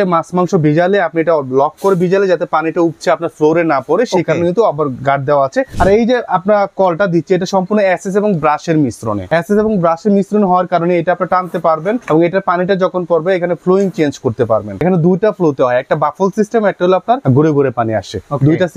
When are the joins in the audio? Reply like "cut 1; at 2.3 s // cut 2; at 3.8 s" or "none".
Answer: cut 1; at 5.7 s // cut 2; at 9.3 s // cut 3; at 12.0 s // cut 4; at 14.8 s // cut 5; at 17.2 s

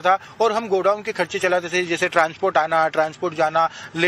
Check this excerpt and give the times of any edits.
cut 1; at 1.9 s

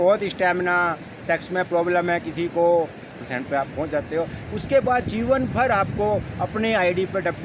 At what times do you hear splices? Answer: cut 1; at 3.2 s

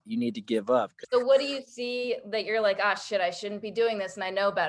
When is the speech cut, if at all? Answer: cut 1; at 1.0 s

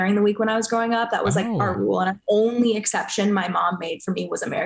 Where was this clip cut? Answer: cut 1; at 2.2 s

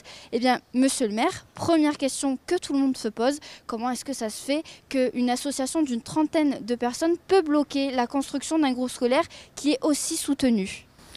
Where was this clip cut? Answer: cut 1; at 10.1 s

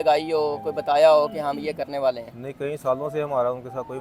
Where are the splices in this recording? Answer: none

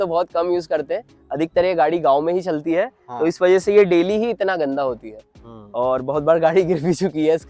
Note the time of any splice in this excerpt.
none

